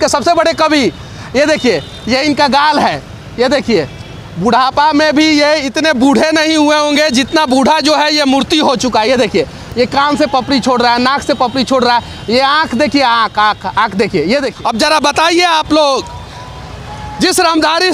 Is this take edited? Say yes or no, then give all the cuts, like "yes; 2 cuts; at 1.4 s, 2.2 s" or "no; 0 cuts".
yes; 1 cut; at 14.5 s